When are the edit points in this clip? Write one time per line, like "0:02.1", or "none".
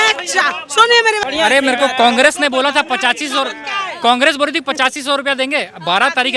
0:01.3